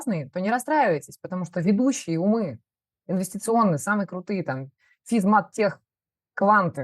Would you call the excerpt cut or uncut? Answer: uncut